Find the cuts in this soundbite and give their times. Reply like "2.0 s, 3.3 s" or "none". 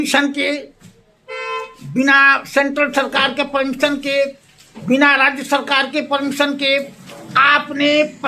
none